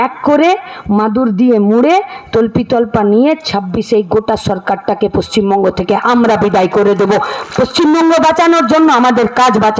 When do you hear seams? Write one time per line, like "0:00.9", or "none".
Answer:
none